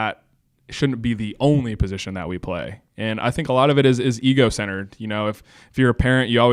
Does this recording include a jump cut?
no; 0 cuts

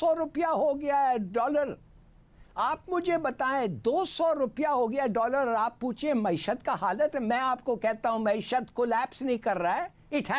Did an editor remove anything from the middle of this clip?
no; 0 cuts

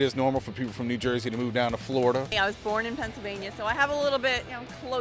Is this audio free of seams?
no; 1 cut; at 2.3 s

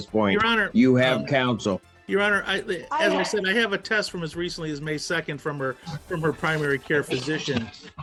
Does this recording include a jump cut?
no; 0 cuts

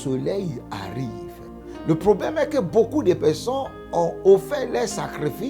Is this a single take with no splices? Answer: no; 1 cut; at 1.7 s

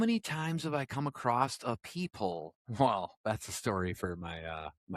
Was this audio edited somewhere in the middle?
no; 0 cuts

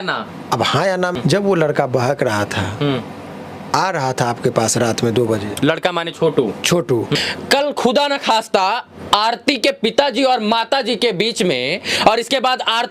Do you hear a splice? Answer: yes; 2 cuts; at 1.2 s, 7.2 s

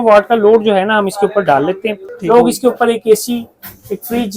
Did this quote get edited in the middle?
yes; 1 cut; at 2.1 s

